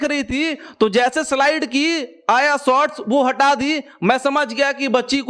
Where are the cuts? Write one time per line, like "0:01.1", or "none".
none

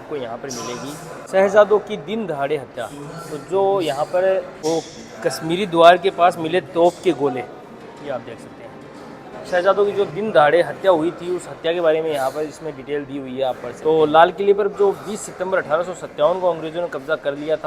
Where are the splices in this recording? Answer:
0:01.3
0:04.5
0:09.3
0:13.7

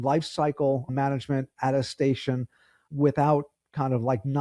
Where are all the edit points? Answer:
0:00.9
0:02.8

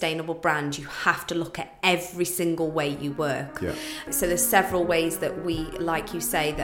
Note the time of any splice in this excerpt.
0:04.1

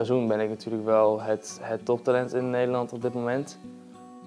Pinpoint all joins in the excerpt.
none

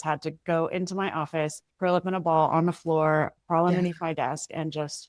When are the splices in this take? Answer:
none

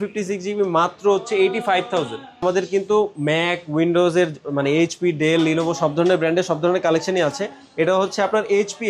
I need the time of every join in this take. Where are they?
0:02.4

